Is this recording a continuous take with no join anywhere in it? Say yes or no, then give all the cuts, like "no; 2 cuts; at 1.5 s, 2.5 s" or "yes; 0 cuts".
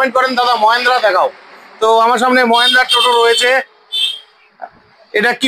yes; 0 cuts